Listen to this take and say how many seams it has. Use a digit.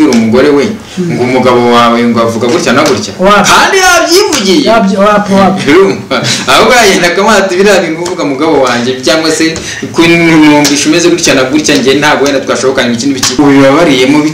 1